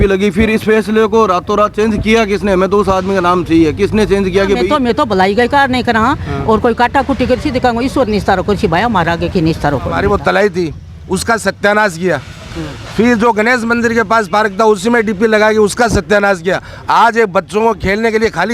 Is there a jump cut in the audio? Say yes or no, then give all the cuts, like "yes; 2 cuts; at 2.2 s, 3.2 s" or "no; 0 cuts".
yes; 2 cuts; at 4.6 s, 9.9 s